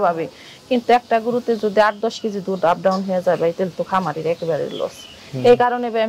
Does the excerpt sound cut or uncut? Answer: uncut